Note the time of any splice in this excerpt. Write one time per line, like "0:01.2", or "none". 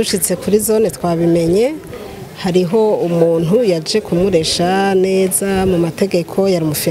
none

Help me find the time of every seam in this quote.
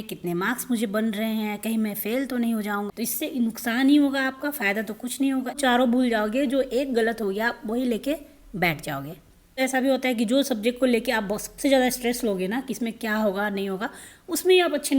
0:02.9
0:05.6
0:09.6

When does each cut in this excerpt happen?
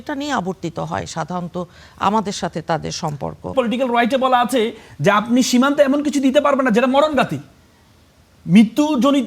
0:03.5

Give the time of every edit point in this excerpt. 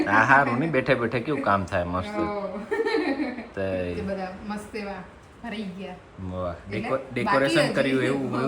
0:04.0

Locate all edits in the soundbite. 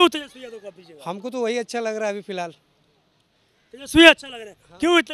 none

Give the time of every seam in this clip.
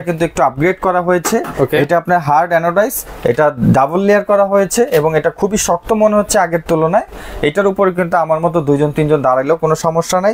none

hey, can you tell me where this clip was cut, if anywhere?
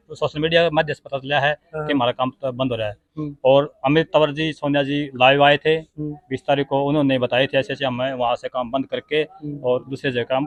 none

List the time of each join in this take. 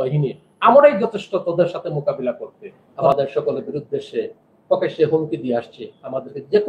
0:03.1

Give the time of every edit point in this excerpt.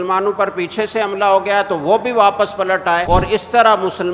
0:03.0

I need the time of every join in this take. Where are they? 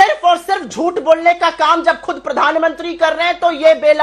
none

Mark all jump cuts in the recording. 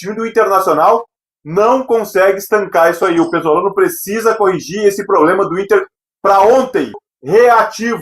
0:07.1

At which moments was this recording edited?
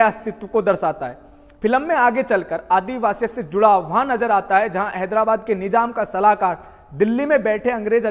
none

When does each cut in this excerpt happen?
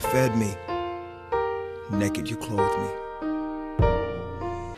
none

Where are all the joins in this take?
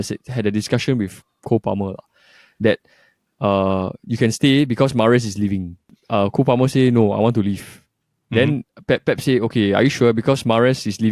0:05.9

